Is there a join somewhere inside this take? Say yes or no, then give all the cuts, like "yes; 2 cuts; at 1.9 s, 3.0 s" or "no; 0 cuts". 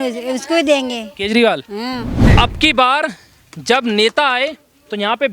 yes; 1 cut; at 2.3 s